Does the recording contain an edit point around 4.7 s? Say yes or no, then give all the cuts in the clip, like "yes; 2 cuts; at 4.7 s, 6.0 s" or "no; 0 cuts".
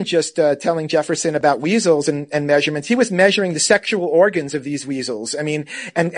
no; 1 cut; at 1.4 s